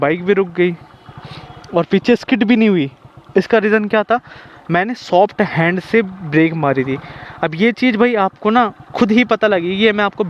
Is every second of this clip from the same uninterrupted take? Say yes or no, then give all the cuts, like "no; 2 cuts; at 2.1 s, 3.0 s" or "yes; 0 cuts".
yes; 0 cuts